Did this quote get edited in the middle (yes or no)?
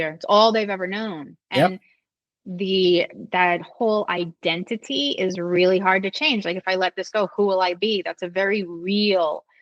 no